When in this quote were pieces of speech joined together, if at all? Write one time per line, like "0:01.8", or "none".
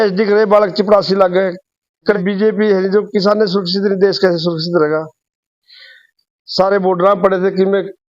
0:02.2